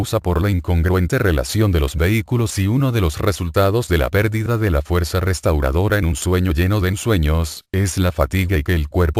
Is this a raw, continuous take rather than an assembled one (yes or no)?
yes